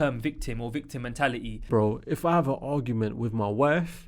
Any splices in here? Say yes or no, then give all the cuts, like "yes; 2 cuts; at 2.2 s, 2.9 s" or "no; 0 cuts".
yes; 1 cut; at 1.7 s